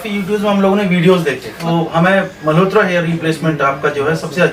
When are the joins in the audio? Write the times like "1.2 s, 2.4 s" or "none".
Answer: 1.5 s

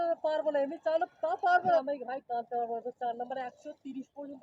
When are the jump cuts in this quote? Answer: 1.8 s

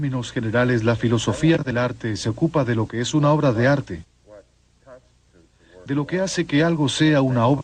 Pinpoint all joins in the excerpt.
none

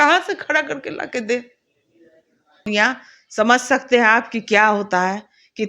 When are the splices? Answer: 2.7 s

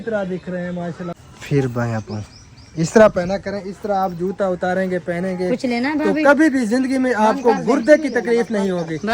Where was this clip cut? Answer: 1.1 s

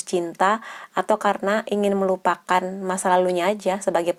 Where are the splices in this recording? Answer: none

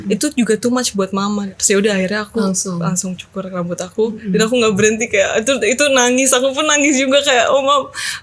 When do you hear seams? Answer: 1.5 s

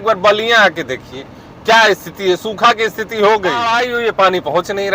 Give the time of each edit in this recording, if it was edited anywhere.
3.7 s

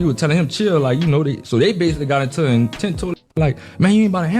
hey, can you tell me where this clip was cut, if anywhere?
3.2 s

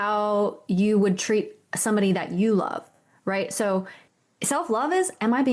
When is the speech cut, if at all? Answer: 4.0 s

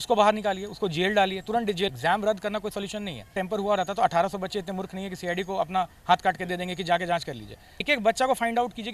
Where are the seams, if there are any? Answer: 1.9 s, 3.3 s, 7.8 s

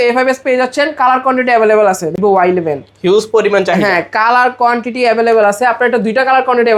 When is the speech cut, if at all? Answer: 2.2 s

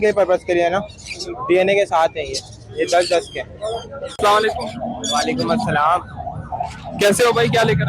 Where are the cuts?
4.0 s

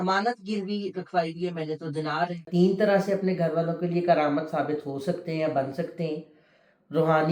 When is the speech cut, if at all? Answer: 2.4 s

